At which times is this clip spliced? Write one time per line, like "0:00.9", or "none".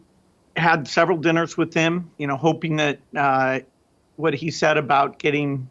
0:02.1